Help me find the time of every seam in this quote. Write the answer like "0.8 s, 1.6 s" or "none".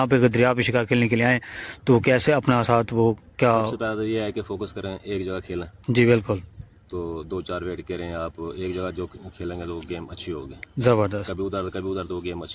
none